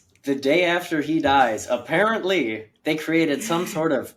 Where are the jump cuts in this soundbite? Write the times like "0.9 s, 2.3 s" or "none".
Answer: none